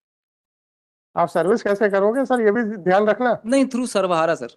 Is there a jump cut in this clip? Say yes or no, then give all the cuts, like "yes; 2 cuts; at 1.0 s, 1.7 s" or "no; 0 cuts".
no; 0 cuts